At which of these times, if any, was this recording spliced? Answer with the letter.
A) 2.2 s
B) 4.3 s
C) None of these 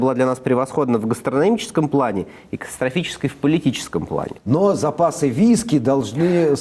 B